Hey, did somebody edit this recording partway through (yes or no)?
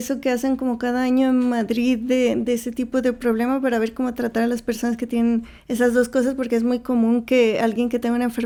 no